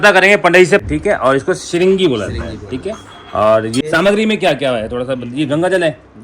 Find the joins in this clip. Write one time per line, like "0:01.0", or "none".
0:00.8
0:03.8